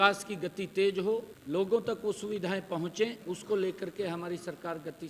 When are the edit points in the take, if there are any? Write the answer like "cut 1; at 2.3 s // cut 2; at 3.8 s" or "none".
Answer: cut 1; at 1.3 s // cut 2; at 3.2 s